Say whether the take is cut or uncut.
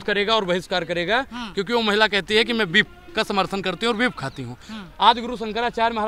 uncut